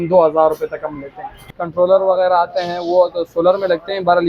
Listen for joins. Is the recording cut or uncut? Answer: cut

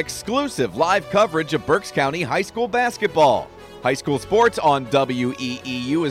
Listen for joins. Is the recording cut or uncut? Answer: uncut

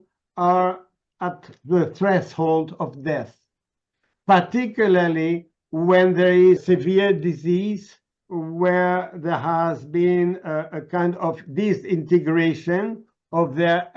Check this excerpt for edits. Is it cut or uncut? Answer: uncut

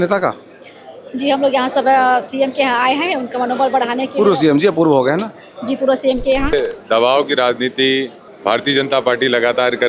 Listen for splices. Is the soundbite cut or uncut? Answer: cut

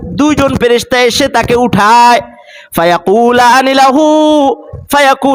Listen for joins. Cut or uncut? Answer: uncut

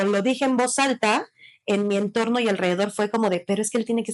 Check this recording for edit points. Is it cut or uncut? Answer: uncut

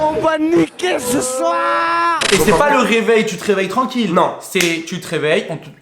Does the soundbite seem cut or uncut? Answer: cut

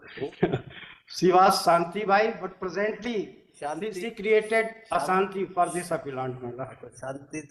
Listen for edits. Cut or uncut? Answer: uncut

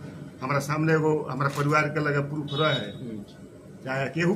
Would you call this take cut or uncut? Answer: uncut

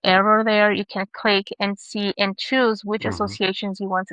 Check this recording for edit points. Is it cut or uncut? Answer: uncut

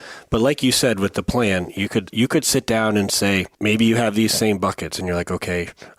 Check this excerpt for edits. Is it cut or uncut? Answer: cut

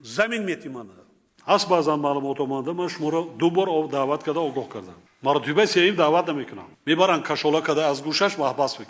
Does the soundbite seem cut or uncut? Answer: cut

